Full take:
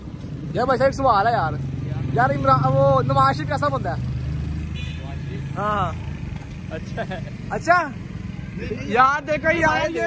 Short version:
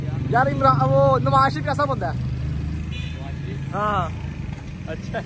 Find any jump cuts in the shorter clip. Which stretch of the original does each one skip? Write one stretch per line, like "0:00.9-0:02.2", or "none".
none